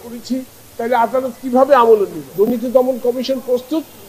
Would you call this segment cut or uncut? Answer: cut